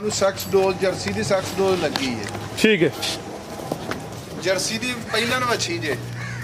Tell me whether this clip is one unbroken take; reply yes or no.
yes